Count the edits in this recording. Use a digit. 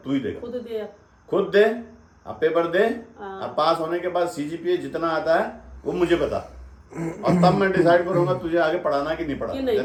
0